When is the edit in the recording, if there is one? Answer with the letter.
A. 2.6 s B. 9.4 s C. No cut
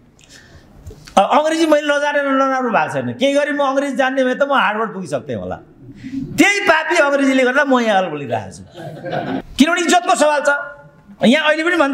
B